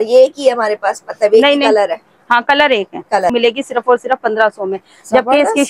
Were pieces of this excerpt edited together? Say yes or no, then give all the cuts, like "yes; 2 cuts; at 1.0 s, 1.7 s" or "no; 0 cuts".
yes; 1 cut; at 3.3 s